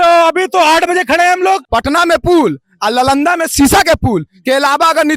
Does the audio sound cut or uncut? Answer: cut